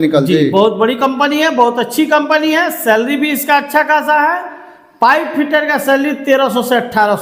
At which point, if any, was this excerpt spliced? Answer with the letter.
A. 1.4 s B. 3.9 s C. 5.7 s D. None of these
D